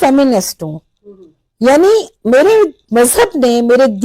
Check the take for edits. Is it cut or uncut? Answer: uncut